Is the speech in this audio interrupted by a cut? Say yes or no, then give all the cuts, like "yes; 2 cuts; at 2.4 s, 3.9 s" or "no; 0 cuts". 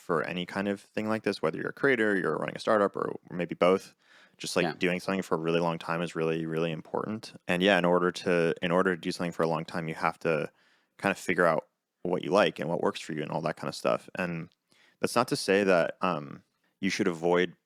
no; 0 cuts